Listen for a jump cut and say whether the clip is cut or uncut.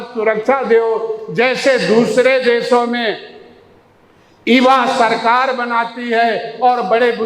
uncut